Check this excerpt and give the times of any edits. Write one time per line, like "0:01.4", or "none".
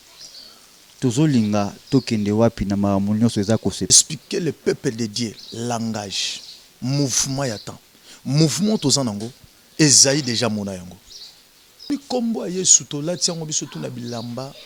0:03.9
0:11.9